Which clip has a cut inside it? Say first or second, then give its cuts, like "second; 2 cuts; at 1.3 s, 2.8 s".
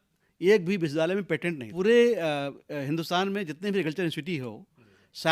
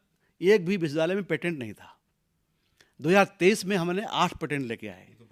first; 1 cut; at 1.7 s